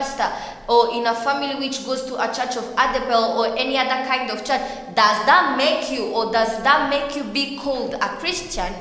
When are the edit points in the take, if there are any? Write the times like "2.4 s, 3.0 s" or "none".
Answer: none